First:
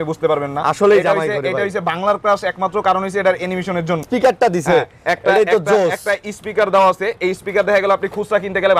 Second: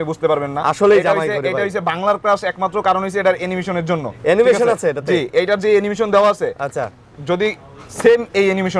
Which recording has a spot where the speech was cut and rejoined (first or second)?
first